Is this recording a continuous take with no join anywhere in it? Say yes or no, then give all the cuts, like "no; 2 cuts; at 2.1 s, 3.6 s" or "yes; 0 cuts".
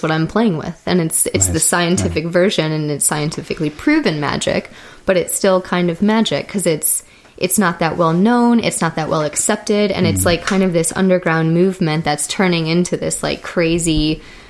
yes; 0 cuts